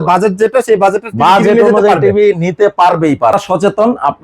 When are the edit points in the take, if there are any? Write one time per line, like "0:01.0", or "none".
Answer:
0:03.3